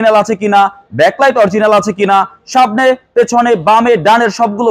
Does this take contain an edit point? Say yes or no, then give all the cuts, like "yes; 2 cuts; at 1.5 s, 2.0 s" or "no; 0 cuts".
no; 0 cuts